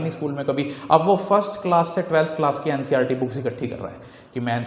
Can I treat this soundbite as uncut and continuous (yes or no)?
yes